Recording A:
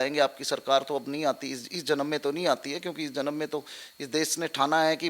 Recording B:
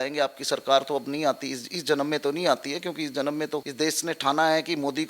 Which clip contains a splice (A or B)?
B